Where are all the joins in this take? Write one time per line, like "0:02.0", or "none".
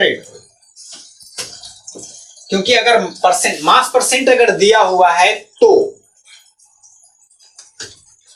none